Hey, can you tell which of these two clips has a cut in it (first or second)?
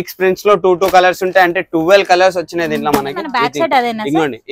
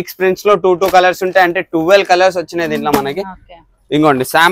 first